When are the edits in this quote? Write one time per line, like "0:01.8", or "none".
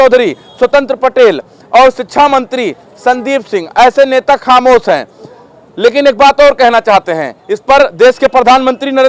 none

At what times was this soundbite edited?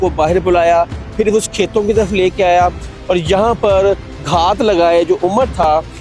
none

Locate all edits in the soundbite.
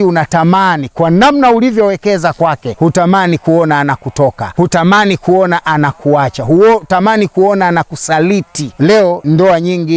0:02.7
0:04.4
0:09.1

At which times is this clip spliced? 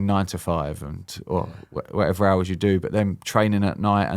none

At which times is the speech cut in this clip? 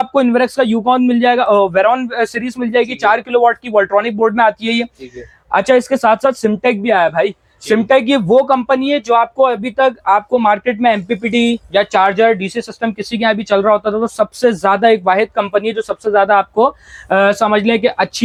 none

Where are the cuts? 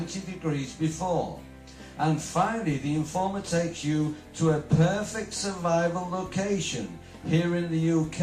0:01.8

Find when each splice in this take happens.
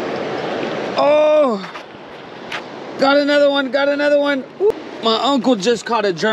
0:04.7

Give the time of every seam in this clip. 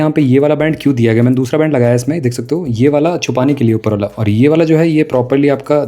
none

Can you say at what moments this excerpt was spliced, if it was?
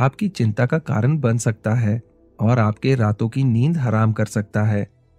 none

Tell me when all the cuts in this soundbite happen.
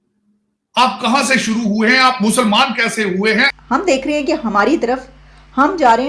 0:03.5

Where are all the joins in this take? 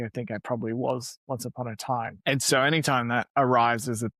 0:02.1
0:03.3

